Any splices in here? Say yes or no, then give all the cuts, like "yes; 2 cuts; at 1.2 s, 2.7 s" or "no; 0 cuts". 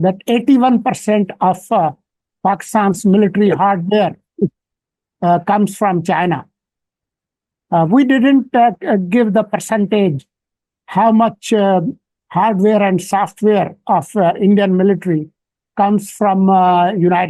no; 0 cuts